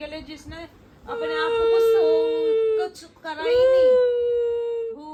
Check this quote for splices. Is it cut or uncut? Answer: uncut